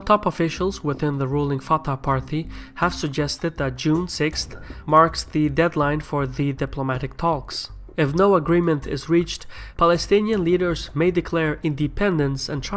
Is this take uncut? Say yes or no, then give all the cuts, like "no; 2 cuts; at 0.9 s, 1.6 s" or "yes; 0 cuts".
yes; 0 cuts